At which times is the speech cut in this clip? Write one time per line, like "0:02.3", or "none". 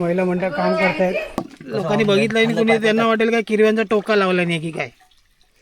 0:01.4